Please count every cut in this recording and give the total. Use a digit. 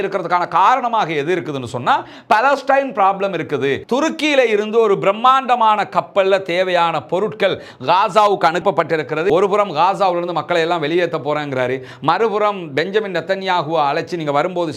2